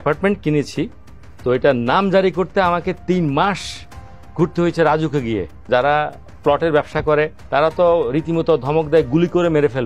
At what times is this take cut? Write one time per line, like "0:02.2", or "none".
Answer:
0:05.6
0:07.4